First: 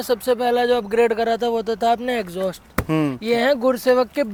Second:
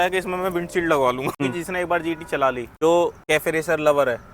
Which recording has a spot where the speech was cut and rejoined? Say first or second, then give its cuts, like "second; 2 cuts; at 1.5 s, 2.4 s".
second; 3 cuts; at 1.4 s, 2.7 s, 3.2 s